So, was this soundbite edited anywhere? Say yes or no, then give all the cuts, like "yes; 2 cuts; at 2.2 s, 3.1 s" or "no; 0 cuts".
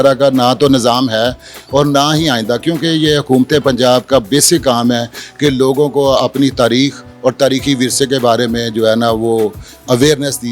no; 0 cuts